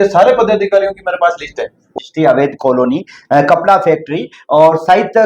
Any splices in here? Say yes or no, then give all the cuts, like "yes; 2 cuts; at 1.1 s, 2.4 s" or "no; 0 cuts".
yes; 1 cut; at 1.9 s